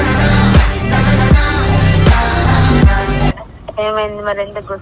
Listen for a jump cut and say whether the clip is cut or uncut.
cut